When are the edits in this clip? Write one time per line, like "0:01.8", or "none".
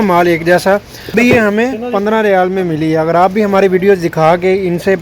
0:01.1